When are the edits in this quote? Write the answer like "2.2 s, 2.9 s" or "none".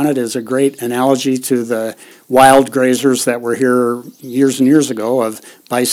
none